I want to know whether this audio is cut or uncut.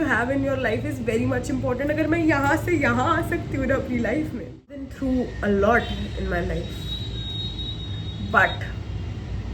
cut